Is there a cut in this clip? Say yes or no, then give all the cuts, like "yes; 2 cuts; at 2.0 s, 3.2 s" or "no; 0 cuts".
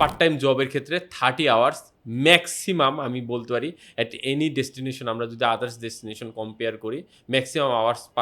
no; 0 cuts